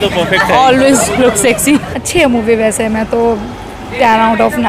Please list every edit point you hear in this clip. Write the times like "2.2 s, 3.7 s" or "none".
1.9 s